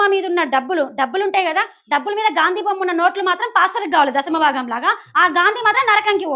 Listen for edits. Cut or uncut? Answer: uncut